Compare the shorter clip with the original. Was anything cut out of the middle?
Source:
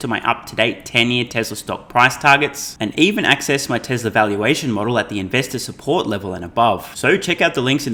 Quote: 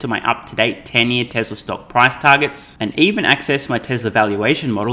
no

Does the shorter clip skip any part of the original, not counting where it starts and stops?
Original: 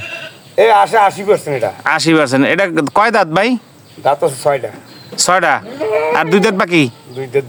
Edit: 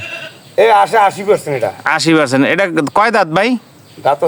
no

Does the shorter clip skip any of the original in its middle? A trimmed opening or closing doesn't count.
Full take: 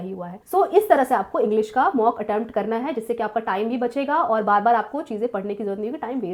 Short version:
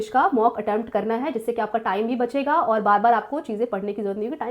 no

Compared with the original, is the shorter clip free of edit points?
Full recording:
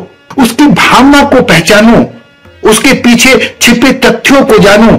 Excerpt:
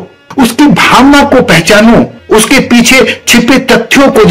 no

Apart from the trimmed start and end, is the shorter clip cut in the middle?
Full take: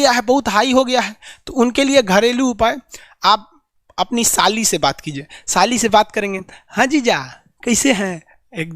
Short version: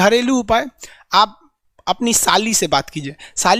no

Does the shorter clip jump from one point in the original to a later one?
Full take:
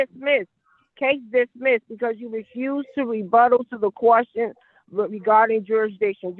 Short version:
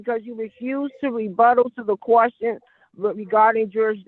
no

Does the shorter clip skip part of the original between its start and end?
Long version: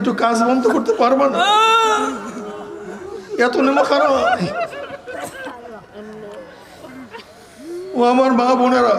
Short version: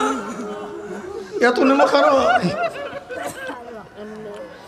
no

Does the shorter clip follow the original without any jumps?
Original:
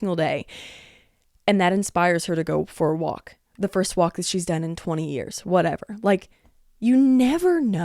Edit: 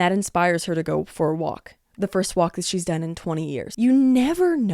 no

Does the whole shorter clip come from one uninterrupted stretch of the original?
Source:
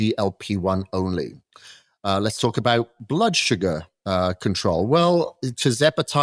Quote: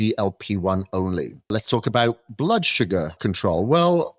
no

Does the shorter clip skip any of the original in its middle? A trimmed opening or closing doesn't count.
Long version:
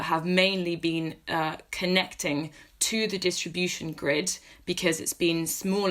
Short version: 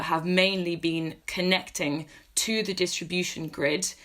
yes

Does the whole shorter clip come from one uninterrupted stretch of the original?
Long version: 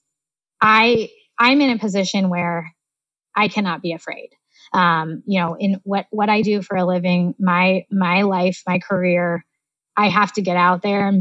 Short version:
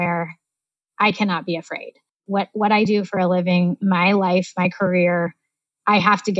no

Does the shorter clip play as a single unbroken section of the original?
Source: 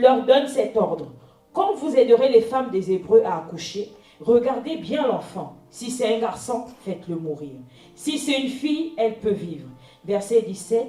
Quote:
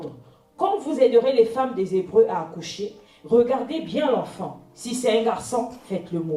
yes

